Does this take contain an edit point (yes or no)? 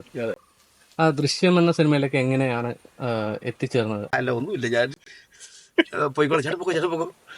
yes